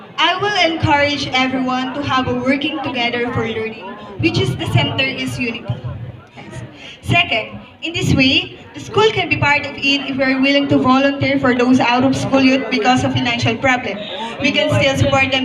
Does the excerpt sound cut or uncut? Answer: cut